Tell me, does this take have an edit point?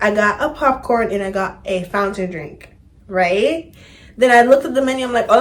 no; 0 cuts

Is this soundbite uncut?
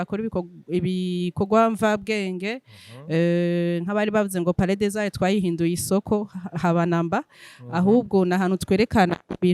yes; 0 cuts

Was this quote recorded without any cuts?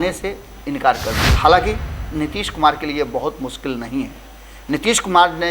no; 1 cut; at 1.2 s

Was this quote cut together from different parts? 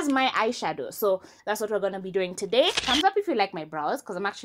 yes; 1 cut; at 2.8 s

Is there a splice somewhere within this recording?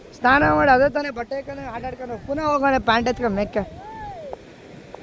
no; 0 cuts

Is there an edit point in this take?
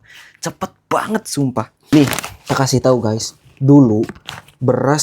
yes; 1 cut; at 1.8 s

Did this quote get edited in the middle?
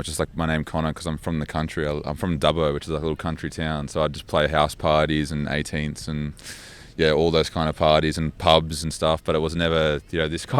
no; 0 cuts

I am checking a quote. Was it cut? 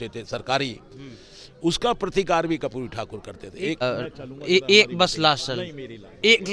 yes; 1 cut; at 3.8 s

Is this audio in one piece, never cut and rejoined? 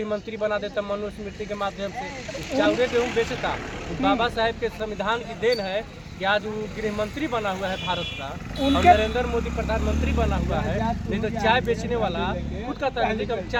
yes; 0 cuts

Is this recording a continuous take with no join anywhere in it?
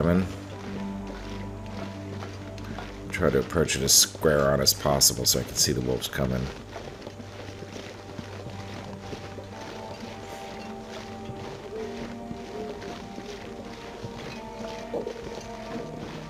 yes; 0 cuts

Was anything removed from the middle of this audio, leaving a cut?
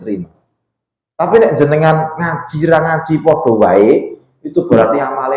no; 0 cuts

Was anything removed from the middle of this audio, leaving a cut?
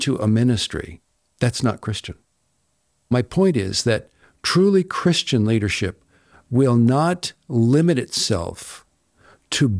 yes; 1 cut; at 3.1 s

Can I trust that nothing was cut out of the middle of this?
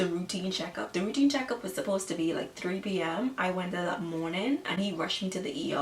yes; 0 cuts

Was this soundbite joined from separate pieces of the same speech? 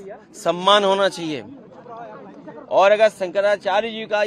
no; 0 cuts

